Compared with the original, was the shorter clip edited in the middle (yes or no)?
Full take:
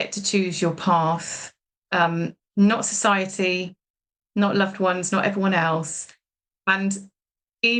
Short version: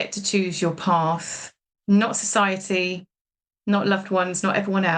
yes